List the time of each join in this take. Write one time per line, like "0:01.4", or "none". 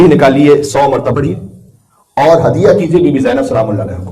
0:01.1